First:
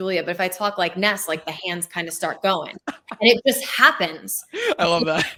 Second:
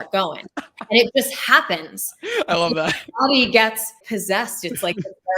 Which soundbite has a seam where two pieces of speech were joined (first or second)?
second